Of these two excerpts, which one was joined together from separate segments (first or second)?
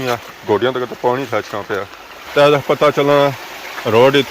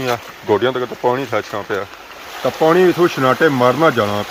first